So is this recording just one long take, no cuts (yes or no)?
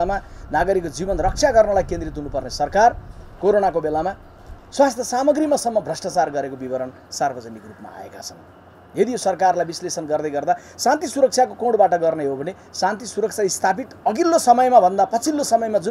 yes